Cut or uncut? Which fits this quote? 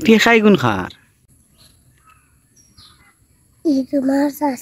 uncut